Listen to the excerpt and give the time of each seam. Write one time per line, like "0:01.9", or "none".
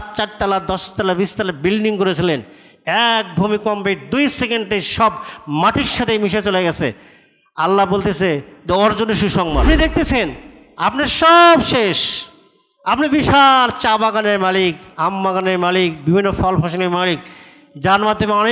0:09.6

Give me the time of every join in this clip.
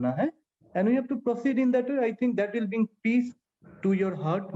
none

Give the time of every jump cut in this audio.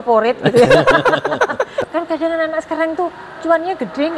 0:01.8

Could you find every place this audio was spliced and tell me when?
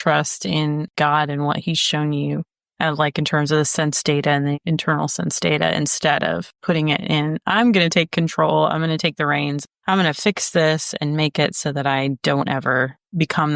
none

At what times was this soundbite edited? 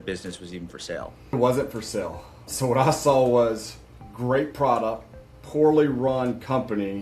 0:01.3

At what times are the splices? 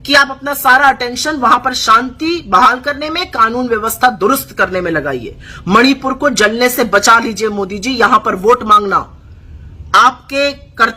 none

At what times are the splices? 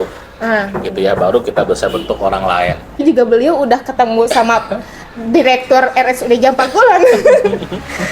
0:03.0

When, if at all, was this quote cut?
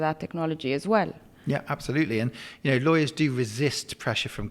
none

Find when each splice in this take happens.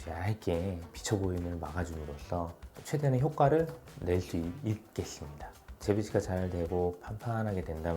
0:02.7
0:05.7

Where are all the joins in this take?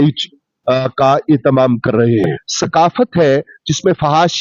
0:02.4

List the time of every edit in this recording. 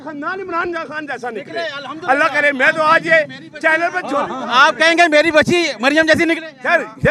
none

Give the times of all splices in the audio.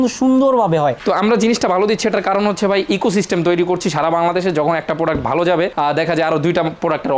0:01.0

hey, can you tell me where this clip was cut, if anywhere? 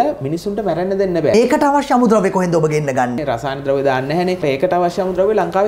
0:01.3
0:03.2
0:04.4

